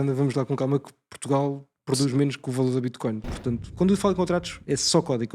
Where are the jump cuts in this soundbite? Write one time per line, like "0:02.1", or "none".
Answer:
0:03.7